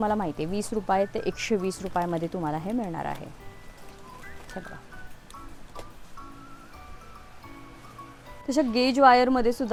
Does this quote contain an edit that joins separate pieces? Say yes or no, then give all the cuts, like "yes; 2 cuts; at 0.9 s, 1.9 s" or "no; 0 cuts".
no; 0 cuts